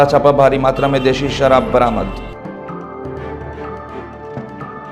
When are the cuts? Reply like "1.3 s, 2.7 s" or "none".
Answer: none

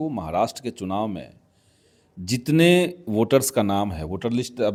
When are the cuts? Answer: none

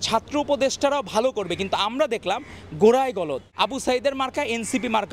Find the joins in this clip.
3.5 s

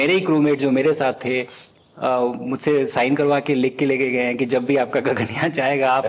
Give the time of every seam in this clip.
none

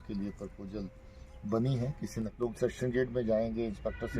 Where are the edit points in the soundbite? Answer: 2.3 s

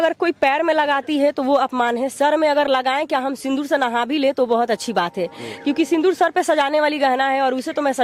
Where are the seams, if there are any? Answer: none

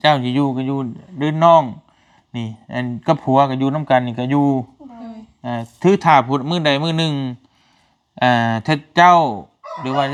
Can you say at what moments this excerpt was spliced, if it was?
none

